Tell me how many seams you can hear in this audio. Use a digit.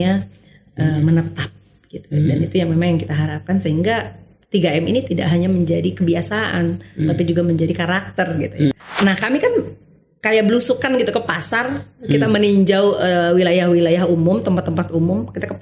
1